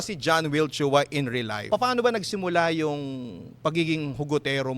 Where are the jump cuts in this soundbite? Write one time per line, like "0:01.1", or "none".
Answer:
0:01.7